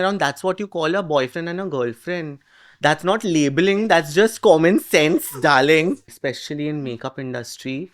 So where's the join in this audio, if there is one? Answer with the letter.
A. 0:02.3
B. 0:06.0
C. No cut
B